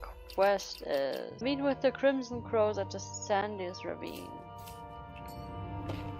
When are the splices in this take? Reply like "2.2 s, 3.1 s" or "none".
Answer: 1.4 s

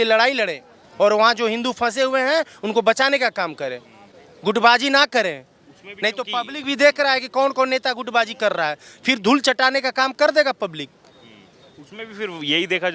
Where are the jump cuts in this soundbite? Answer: none

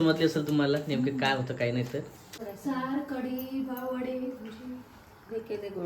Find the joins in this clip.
2.4 s

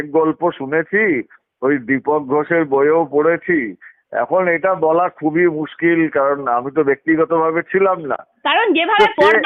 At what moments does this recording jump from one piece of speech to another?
none

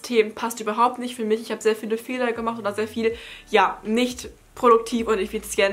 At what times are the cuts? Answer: none

